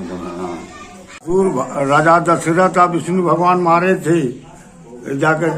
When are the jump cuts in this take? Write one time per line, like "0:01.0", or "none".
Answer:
0:01.2